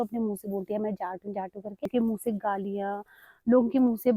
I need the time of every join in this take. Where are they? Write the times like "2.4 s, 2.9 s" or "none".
1.8 s